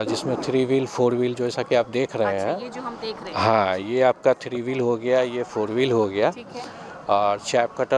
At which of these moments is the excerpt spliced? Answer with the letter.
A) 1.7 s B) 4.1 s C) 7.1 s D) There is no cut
D